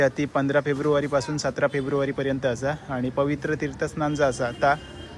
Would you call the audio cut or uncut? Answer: uncut